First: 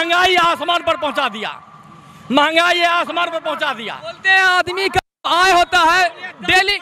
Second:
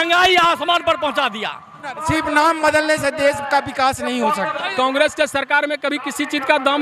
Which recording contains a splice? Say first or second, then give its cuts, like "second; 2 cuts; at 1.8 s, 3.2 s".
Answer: second; 2 cuts; at 2.0 s, 4.7 s